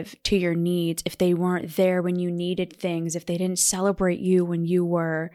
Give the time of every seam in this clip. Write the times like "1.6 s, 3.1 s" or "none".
none